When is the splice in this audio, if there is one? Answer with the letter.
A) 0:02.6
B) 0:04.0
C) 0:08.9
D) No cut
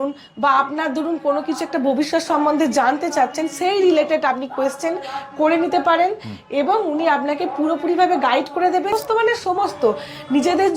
C